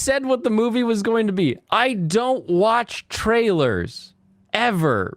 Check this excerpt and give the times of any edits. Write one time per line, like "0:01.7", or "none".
none